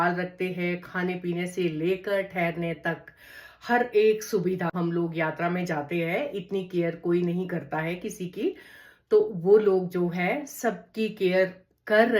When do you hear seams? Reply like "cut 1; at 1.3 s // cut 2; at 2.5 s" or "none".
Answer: cut 1; at 4.7 s